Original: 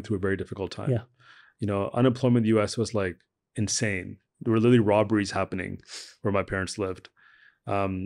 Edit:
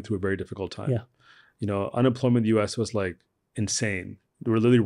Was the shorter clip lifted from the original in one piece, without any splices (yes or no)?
yes